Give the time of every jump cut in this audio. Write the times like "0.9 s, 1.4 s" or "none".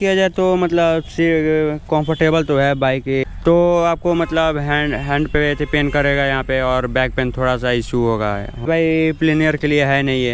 3.2 s, 8.7 s

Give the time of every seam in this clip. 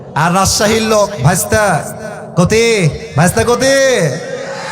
3.0 s

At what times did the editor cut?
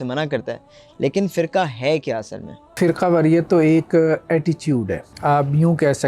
2.8 s, 5.0 s

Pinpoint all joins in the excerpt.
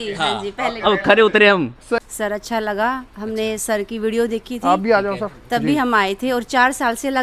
2.0 s

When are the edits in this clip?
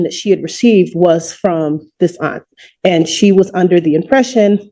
none

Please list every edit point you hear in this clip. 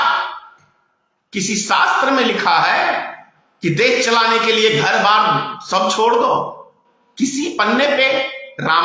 none

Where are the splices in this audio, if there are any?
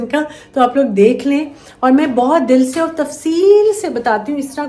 none

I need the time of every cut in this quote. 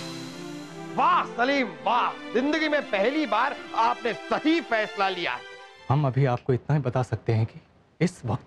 5.8 s

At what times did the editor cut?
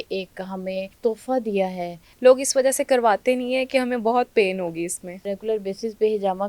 0.9 s, 2.0 s, 5.4 s

